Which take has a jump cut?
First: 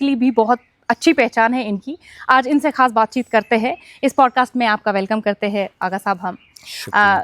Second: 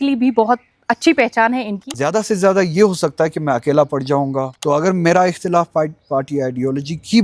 second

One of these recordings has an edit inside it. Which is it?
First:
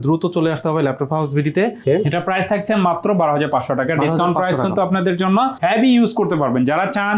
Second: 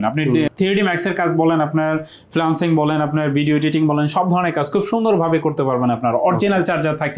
first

